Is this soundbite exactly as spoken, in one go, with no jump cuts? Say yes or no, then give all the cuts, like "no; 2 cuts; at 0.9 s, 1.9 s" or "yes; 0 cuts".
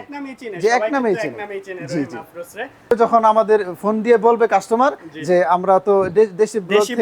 no; 1 cut; at 2.9 s